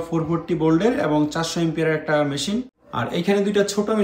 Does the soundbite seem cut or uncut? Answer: cut